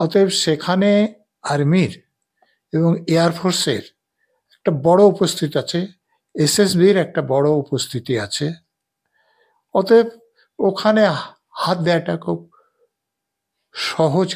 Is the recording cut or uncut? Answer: uncut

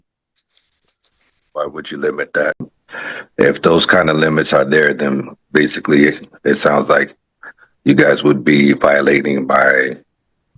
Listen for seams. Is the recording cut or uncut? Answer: cut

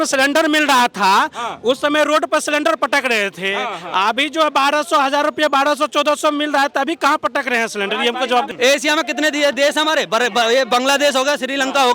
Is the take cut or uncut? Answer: cut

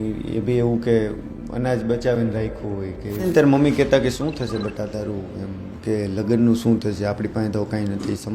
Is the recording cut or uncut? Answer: cut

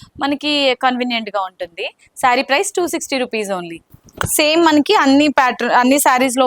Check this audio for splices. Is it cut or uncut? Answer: uncut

